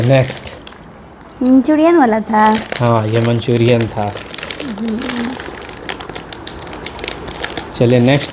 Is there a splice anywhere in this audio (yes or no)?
no